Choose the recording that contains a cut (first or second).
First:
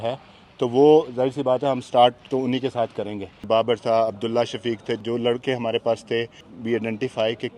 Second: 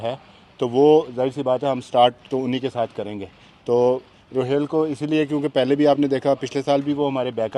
first